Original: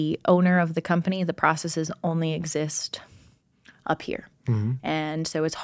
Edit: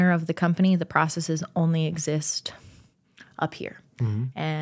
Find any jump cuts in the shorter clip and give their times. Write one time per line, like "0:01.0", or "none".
none